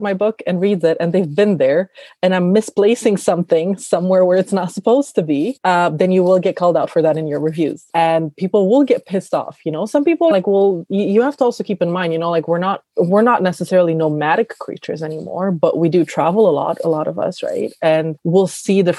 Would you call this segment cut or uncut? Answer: cut